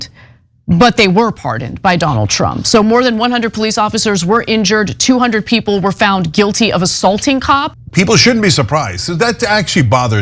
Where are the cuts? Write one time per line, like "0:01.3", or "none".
0:07.8